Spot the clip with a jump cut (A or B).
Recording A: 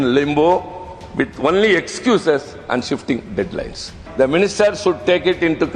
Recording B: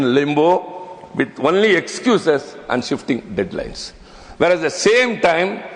A